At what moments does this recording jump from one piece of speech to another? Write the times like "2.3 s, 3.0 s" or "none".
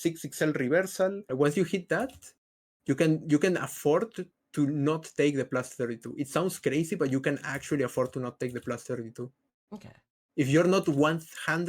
1.2 s